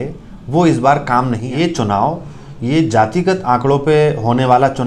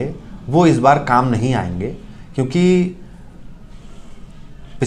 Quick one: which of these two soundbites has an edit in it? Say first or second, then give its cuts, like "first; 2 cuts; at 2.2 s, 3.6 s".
first; 1 cut; at 1.5 s